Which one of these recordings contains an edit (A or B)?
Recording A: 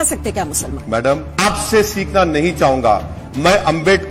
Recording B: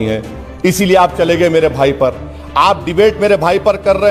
A